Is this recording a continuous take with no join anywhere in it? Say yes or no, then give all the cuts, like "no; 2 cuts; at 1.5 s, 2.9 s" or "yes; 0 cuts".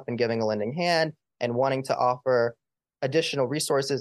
yes; 0 cuts